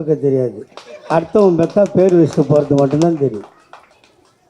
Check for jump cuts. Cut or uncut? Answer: uncut